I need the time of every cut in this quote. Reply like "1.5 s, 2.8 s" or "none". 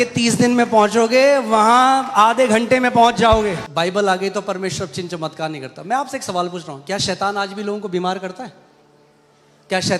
3.6 s